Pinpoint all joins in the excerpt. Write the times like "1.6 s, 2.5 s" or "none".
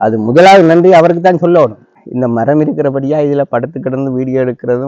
1.9 s